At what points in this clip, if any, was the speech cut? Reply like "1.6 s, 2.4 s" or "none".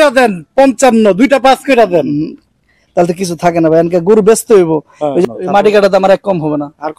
5.2 s